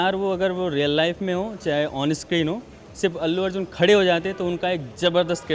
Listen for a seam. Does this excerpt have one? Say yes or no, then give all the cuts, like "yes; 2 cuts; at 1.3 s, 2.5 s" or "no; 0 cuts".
no; 0 cuts